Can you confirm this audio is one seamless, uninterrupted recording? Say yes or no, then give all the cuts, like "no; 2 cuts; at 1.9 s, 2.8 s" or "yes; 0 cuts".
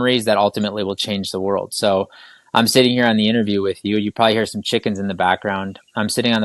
yes; 0 cuts